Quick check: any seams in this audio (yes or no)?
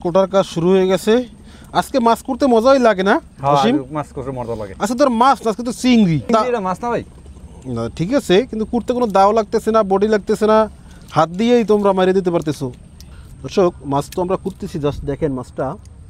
no